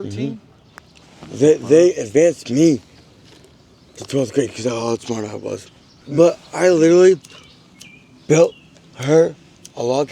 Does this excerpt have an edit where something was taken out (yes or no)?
yes